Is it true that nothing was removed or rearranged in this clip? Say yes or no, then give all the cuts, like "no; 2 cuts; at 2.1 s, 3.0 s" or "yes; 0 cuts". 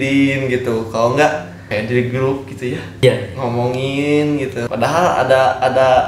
no; 3 cuts; at 1.6 s, 3.0 s, 4.7 s